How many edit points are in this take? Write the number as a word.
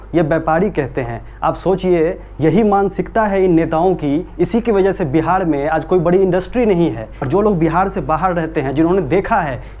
one